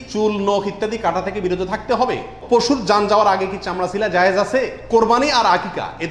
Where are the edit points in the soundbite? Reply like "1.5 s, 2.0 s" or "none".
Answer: 2.3 s, 4.8 s